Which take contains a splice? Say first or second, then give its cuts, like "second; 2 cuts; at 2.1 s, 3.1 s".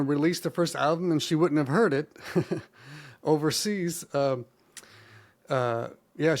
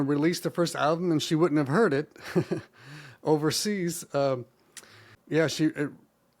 second; 1 cut; at 5.1 s